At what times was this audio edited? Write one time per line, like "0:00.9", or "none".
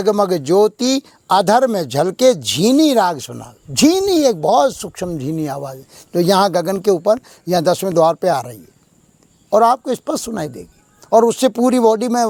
none